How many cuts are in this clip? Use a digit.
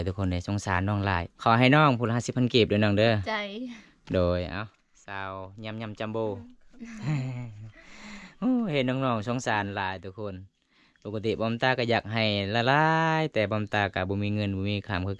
1